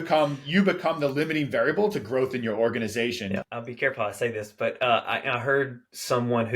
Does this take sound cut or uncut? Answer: cut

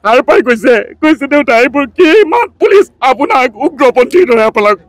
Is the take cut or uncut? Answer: uncut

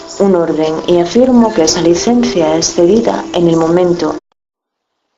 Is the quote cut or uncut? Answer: uncut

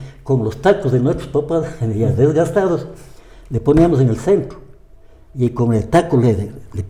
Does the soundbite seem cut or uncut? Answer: uncut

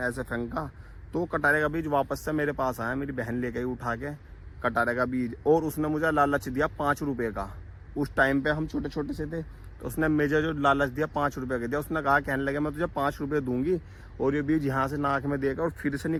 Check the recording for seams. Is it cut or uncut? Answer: uncut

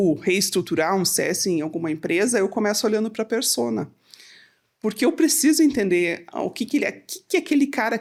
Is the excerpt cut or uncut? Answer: uncut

